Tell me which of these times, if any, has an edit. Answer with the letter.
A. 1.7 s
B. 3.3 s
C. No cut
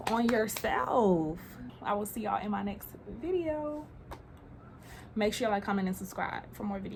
C